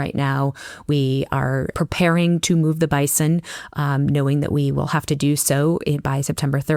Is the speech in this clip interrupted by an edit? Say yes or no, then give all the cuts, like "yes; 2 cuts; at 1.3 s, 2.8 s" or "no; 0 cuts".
yes; 1 cut; at 1.7 s